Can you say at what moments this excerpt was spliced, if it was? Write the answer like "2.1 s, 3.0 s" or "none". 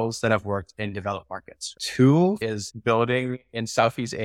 1.8 s, 2.4 s